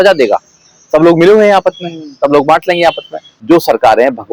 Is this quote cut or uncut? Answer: cut